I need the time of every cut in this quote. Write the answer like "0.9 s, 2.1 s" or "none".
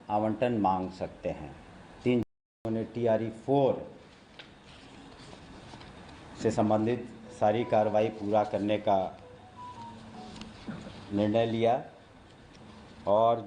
2.3 s